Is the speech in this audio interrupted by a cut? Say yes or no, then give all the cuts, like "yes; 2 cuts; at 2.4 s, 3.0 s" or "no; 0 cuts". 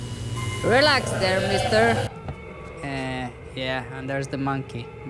yes; 1 cut; at 2.1 s